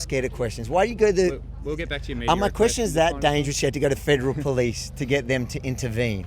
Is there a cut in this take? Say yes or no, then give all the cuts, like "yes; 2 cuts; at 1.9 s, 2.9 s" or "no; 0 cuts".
no; 0 cuts